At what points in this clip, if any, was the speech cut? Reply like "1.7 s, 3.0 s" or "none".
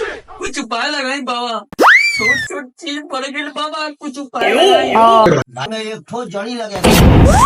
5.6 s